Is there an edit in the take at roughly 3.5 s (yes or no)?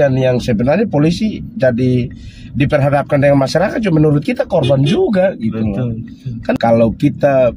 no